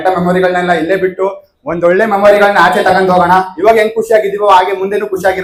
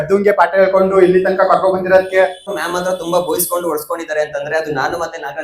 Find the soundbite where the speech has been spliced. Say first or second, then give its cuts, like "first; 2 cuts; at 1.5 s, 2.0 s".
second; 1 cut; at 2.5 s